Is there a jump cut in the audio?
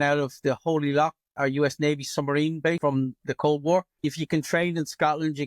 yes; 3 cuts; at 1.3 s, 2.8 s, 4.0 s

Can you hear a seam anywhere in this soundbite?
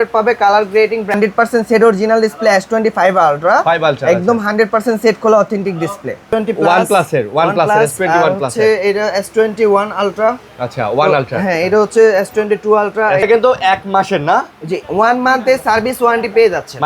yes; 3 cuts; at 1.1 s, 6.2 s, 13.2 s

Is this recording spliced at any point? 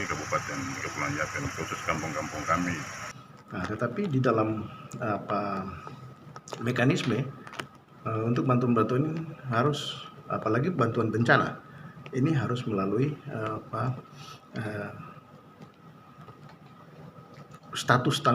yes; 1 cut; at 3.3 s

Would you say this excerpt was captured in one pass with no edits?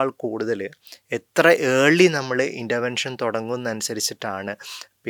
yes; 0 cuts

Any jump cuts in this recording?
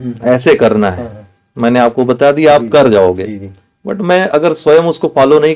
no; 0 cuts

